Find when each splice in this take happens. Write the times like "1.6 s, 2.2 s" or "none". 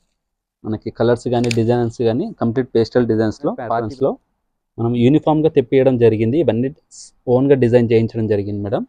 3.7 s